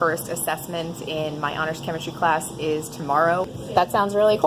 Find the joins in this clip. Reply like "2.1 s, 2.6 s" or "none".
3.5 s